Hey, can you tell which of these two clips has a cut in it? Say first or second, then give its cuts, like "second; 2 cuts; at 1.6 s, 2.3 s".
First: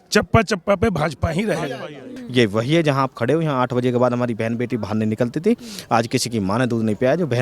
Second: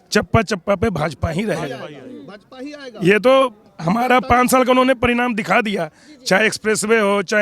first; 1 cut; at 2.2 s